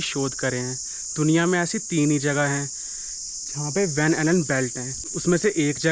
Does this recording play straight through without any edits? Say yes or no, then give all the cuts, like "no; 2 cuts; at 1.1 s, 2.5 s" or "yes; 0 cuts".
yes; 0 cuts